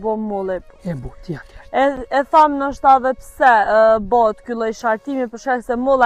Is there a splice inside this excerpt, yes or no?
no